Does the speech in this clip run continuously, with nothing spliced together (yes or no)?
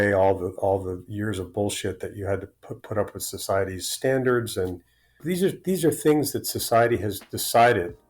no